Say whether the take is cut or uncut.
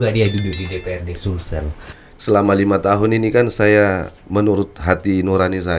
cut